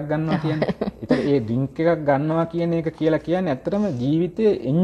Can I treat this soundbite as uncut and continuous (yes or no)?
yes